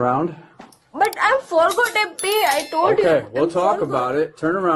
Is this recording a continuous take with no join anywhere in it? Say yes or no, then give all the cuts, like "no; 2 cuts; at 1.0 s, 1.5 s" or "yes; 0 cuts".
yes; 0 cuts